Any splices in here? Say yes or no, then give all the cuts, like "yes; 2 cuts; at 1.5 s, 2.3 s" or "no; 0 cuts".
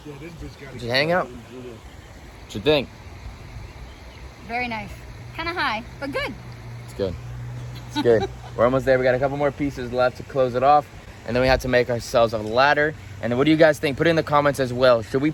no; 0 cuts